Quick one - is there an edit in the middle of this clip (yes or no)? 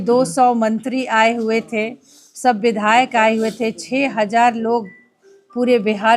no